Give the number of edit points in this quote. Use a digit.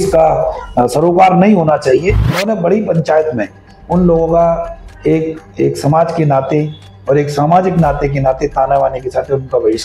1